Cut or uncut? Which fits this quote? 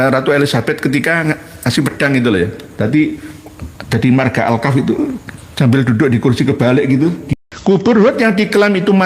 cut